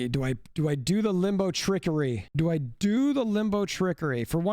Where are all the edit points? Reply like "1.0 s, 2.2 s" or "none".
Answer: 2.2 s